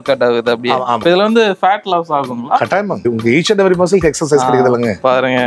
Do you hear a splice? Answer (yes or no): yes